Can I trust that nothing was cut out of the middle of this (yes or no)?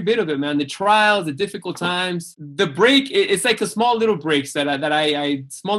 no